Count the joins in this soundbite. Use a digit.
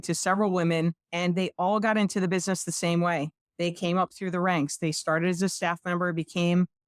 1